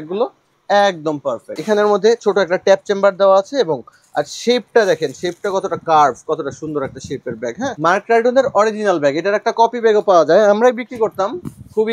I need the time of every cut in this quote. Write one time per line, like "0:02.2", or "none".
0:01.5